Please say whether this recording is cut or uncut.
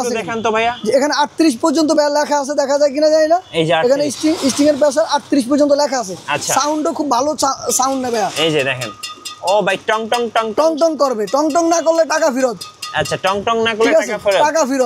uncut